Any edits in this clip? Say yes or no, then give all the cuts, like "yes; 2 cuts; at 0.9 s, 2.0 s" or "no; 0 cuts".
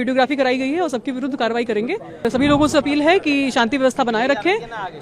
yes; 1 cut; at 2.3 s